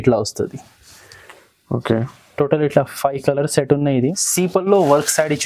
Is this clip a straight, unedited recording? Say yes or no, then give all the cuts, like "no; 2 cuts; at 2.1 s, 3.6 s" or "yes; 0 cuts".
no; 1 cut; at 4.0 s